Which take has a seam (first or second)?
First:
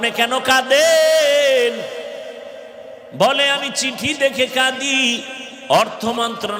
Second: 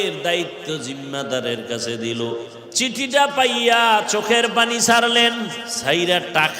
second